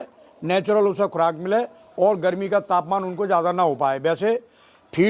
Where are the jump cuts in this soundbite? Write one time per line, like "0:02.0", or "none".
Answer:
none